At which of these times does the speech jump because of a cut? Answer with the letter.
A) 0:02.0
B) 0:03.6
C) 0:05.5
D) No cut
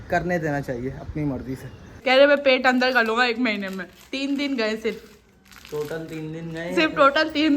A